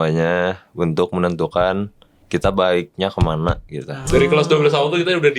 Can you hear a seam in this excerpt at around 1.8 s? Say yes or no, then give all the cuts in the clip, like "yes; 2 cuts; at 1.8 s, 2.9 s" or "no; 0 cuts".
no; 1 cut; at 3.9 s